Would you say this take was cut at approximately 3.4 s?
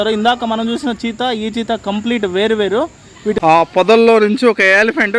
yes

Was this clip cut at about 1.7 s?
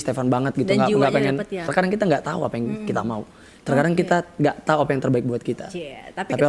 yes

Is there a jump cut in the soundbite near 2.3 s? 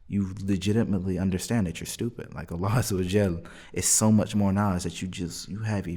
no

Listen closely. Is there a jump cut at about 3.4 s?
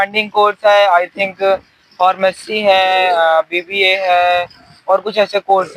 no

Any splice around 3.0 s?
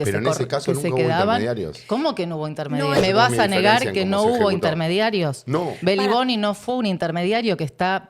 yes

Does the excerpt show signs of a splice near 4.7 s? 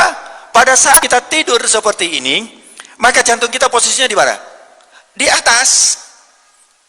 no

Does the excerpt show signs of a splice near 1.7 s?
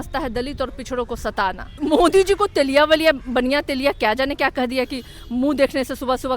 yes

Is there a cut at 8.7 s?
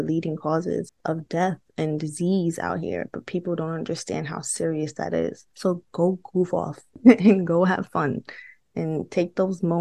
no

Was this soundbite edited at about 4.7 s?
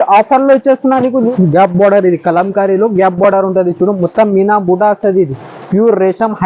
no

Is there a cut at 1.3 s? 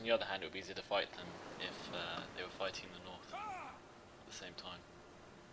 no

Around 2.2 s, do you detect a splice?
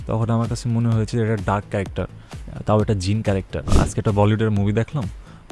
no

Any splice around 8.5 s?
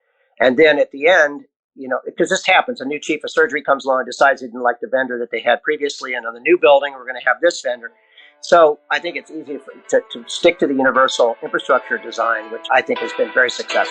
no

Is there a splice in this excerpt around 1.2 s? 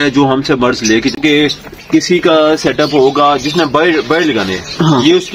yes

